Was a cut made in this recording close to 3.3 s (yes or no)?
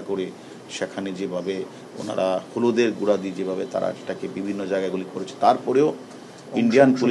no